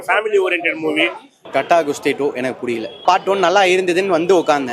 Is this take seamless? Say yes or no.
no